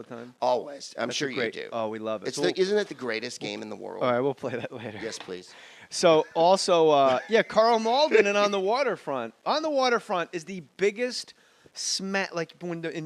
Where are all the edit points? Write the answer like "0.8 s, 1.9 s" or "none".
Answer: 11.3 s